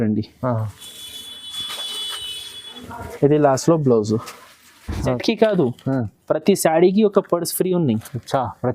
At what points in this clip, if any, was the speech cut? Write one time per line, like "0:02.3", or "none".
0:05.2